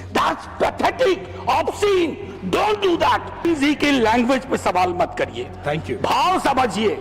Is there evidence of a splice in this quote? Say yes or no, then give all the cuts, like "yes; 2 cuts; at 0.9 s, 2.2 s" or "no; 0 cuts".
yes; 1 cut; at 3.4 s